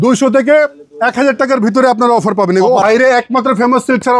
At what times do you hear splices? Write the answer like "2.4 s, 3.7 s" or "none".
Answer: 2.8 s